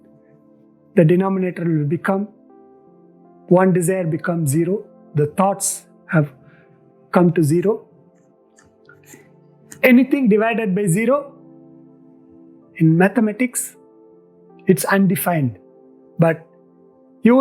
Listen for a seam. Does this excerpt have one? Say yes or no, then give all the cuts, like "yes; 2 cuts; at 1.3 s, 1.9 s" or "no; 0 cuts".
yes; 1 cut; at 0.9 s